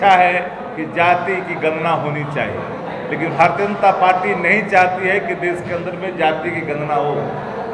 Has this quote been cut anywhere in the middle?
no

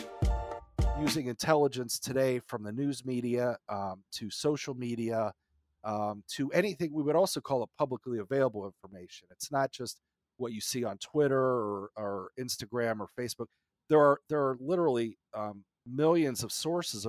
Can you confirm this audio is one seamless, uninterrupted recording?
no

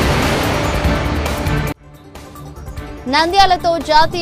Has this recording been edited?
yes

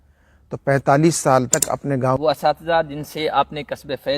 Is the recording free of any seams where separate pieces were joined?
no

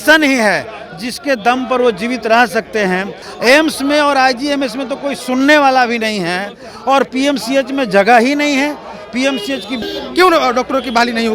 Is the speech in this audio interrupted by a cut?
yes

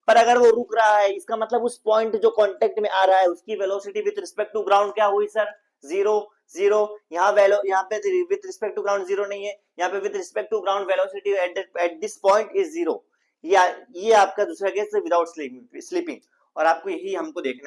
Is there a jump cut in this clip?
no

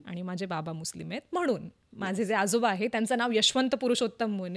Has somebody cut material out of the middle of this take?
no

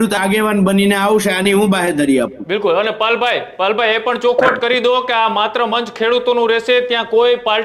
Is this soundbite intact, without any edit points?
yes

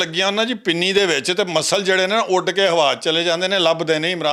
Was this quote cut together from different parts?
no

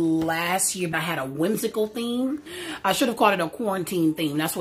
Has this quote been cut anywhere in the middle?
no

